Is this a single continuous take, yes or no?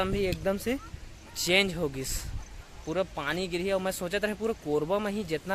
yes